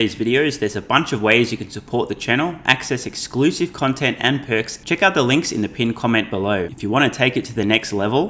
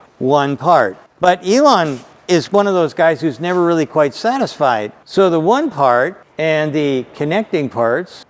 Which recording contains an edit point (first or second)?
first